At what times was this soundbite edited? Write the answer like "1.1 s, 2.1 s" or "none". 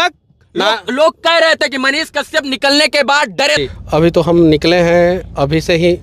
3.6 s